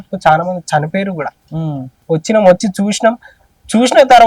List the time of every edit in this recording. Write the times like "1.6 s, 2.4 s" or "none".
1.9 s